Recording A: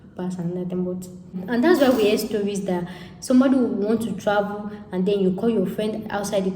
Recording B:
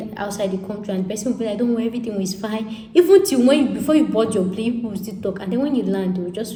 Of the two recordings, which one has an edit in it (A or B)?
A